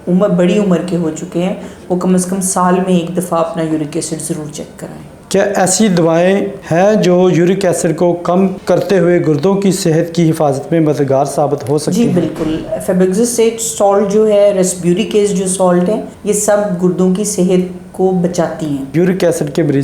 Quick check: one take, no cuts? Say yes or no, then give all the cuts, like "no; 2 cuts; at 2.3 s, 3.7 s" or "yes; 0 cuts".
yes; 0 cuts